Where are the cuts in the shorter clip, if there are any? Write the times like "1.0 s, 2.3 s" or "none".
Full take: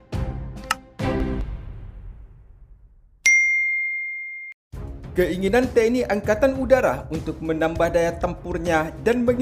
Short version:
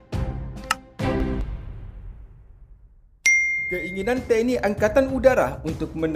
3.7 s